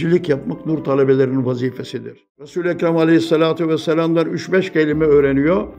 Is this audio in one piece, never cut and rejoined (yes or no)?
no